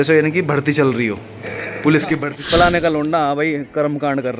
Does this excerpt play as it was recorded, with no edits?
no; 1 cut; at 2.3 s

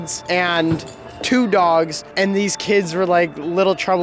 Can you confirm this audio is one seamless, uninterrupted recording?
yes; 0 cuts

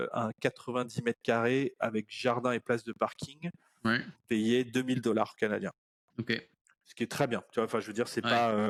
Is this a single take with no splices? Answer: yes; 0 cuts

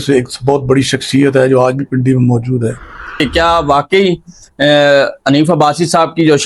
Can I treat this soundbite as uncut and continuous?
no; 1 cut; at 3.2 s

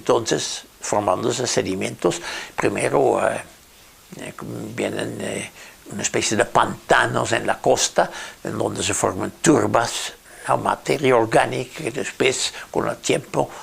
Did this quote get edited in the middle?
yes; 1 cut; at 8.2 s

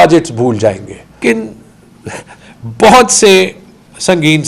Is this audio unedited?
no; 1 cut; at 1.2 s

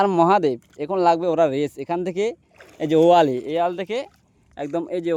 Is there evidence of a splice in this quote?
no; 0 cuts

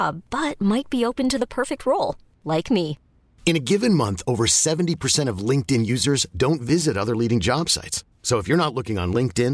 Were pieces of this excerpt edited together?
no; 0 cuts

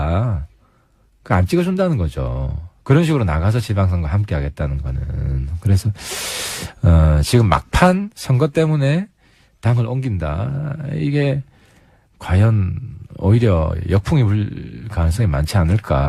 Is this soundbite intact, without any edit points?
no; 1 cut; at 3.5 s

